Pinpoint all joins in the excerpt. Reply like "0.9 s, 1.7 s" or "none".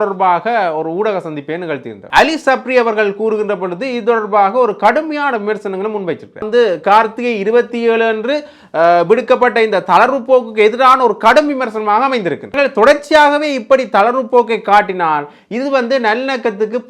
2.1 s, 6.5 s, 12.6 s